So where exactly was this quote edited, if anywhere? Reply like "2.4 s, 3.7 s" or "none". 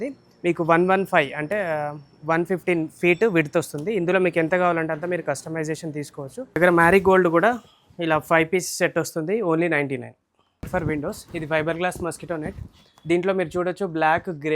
6.6 s, 10.7 s